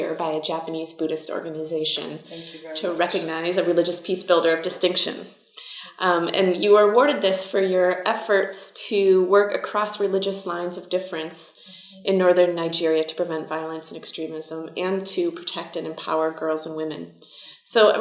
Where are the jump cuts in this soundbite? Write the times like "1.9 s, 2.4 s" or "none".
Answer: 12.6 s